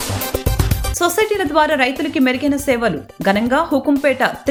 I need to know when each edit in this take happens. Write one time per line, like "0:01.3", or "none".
none